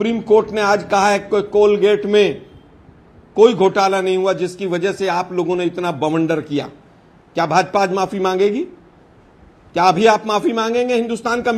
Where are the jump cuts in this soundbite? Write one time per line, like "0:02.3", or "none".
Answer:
none